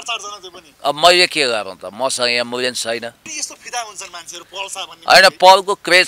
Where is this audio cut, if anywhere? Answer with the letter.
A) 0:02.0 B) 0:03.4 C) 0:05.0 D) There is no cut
B